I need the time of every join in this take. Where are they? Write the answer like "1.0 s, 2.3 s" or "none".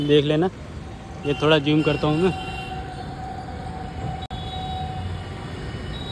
none